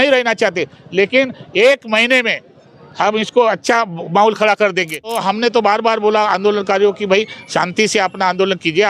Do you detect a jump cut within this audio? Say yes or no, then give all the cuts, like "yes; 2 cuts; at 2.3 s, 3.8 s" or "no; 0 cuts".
yes; 1 cut; at 5.2 s